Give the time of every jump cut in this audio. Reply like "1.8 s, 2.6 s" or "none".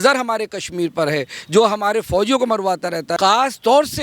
3.1 s